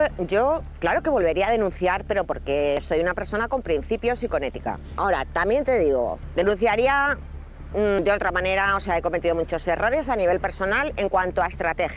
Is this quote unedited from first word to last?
yes; 0 cuts

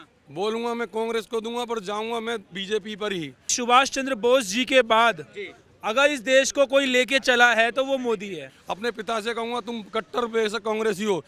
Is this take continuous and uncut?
no; 2 cuts; at 3.5 s, 8.5 s

